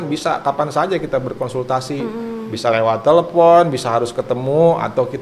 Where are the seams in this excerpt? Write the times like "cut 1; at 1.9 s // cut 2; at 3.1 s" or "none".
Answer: none